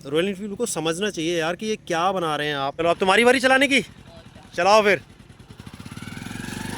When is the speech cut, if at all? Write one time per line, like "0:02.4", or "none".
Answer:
0:02.8